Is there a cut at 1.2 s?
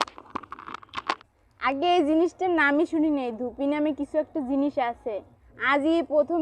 yes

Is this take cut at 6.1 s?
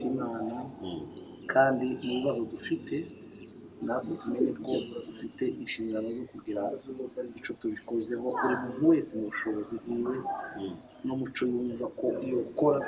no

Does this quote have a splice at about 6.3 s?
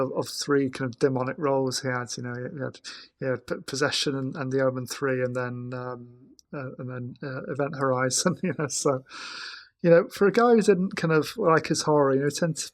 no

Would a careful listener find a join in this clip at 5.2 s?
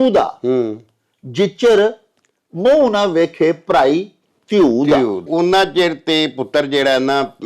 yes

